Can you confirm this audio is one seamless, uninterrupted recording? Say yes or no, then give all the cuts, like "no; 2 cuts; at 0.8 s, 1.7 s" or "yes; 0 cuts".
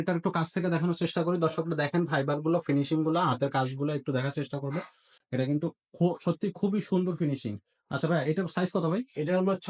yes; 0 cuts